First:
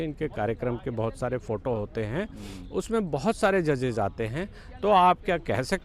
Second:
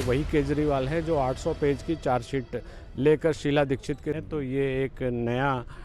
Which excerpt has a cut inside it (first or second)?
second